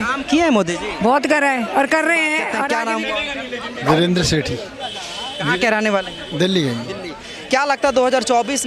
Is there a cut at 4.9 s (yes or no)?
no